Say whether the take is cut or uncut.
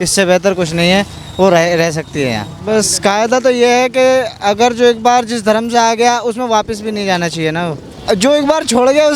cut